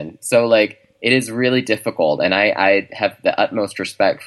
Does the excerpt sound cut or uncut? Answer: uncut